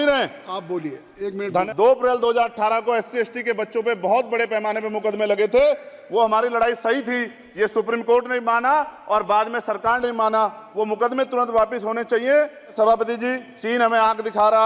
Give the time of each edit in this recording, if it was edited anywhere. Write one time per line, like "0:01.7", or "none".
0:01.7
0:12.7

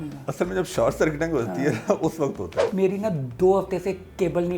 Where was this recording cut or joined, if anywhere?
0:02.5

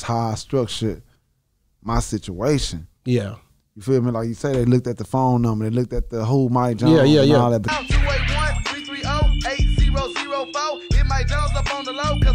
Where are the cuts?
none

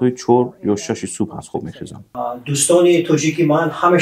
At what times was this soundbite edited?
0:02.1

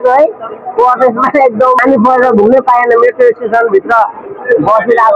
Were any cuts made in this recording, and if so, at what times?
0:01.8

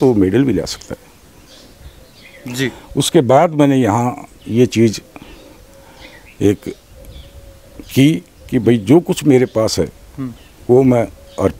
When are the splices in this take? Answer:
none

